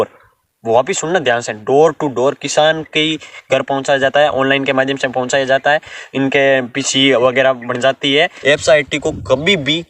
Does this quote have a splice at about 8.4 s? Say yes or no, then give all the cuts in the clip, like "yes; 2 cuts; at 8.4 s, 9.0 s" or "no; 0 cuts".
yes; 1 cut; at 8.4 s